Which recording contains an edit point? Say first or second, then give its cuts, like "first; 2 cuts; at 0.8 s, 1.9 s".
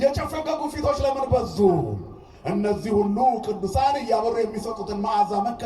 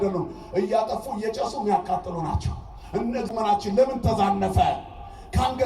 second; 1 cut; at 3.3 s